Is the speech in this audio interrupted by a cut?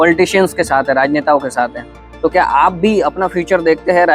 no; 0 cuts

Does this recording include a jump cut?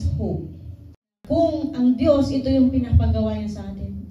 yes; 1 cut; at 1.2 s

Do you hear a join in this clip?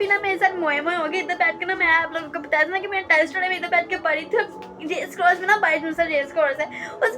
no; 0 cuts

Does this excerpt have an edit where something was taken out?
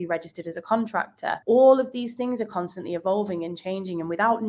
yes; 1 cut; at 1.4 s

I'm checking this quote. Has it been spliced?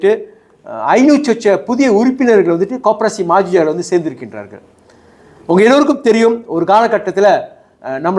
no; 0 cuts

